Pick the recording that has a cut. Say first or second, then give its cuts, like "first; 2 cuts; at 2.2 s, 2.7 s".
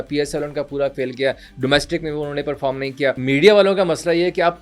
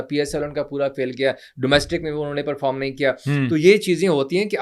first; 1 cut; at 3.2 s